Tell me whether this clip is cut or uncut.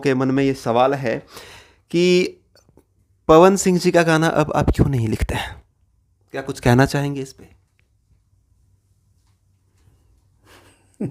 uncut